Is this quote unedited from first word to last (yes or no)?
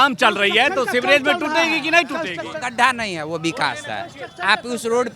yes